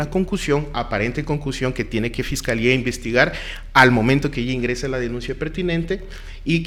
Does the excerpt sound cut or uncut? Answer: uncut